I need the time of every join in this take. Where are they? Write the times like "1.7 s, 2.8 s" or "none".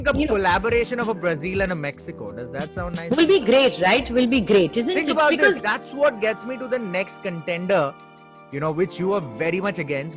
none